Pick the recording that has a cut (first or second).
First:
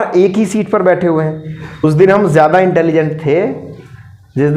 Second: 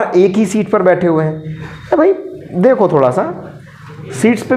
first